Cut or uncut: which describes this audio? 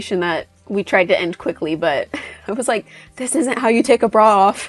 uncut